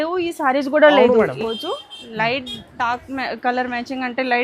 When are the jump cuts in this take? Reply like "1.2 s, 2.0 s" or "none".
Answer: 1.4 s